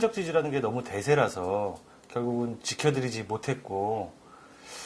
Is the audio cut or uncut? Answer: cut